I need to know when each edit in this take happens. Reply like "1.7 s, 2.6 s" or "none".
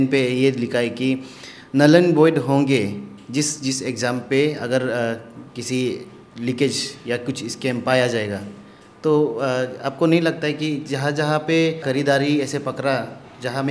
11.8 s